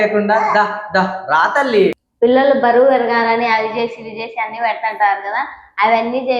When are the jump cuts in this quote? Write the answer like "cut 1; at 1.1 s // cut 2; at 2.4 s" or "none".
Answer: cut 1; at 2.0 s